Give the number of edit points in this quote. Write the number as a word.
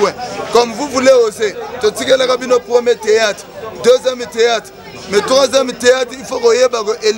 zero